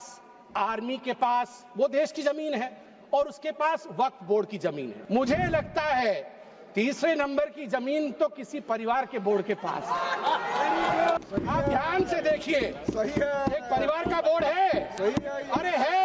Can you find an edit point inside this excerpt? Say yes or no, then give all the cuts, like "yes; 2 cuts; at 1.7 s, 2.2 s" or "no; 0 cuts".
yes; 2 cuts; at 4.9 s, 11.2 s